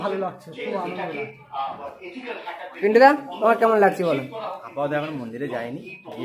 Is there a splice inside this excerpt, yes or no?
no